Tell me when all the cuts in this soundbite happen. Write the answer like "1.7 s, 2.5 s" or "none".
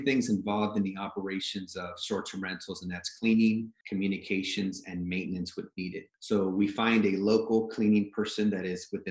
3.8 s, 6.1 s